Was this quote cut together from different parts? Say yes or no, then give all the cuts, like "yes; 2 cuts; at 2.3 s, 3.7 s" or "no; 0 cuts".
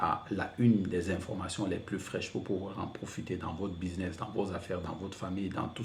no; 0 cuts